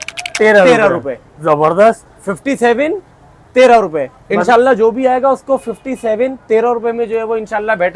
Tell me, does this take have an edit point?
no; 0 cuts

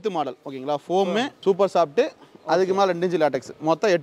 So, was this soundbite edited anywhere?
yes; 1 cut; at 1.3 s

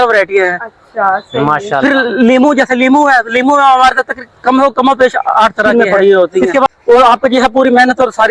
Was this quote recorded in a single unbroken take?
no; 1 cut; at 5.7 s

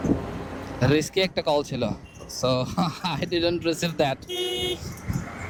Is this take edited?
no; 0 cuts

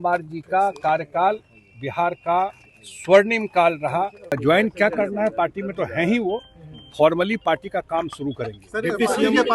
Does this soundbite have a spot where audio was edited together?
yes; 1 cut; at 4.3 s

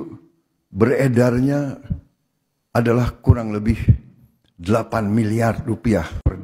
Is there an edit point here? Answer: no; 0 cuts

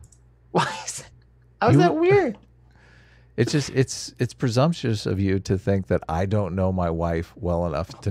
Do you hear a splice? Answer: no; 0 cuts

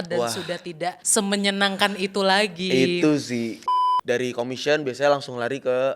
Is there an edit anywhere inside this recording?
yes; 2 cuts; at 1.0 s, 3.6 s

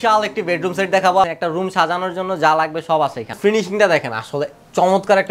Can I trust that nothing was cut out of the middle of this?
no; 2 cuts; at 1.3 s, 3.3 s

